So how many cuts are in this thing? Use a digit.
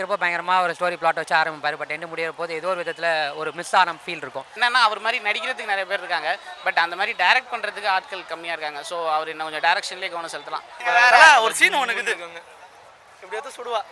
2